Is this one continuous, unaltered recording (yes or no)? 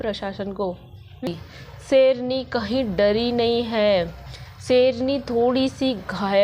no